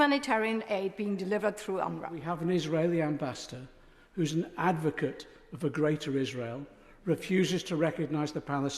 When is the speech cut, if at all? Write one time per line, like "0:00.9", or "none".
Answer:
0:02.2

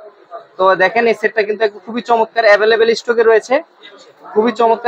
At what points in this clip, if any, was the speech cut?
none

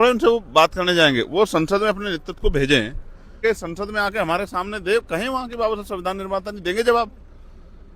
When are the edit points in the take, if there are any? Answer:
0:03.4

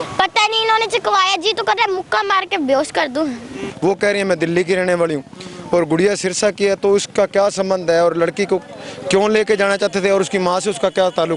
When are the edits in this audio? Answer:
0:03.7

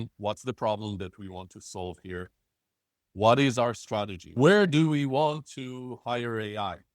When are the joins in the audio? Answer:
0:04.3

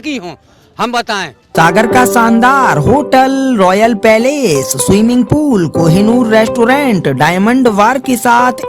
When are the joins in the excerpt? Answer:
0:01.4

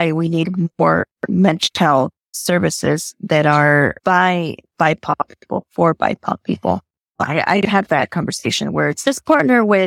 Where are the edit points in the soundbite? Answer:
0:02.3
0:04.0
0:07.0

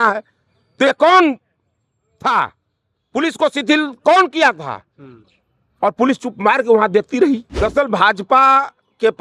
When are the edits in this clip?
0:07.5

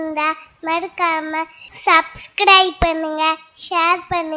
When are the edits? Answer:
none

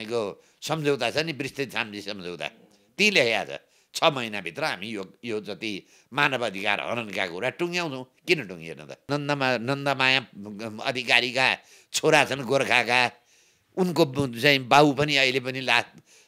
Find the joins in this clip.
0:09.1

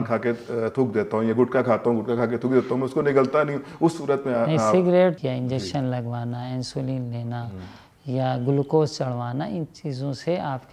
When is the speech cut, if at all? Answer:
0:05.2

